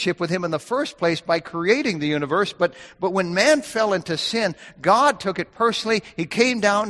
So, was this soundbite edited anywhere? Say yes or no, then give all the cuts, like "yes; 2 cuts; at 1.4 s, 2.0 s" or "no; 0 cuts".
no; 0 cuts